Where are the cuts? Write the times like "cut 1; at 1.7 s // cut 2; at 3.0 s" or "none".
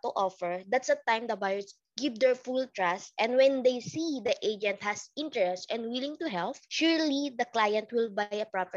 cut 1; at 6.6 s